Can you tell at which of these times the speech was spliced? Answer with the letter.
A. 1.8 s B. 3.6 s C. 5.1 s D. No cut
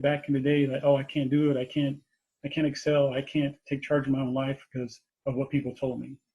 C